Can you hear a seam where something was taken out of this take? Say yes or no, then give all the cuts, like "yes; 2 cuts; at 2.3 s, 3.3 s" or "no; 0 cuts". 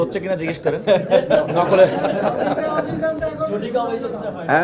no; 0 cuts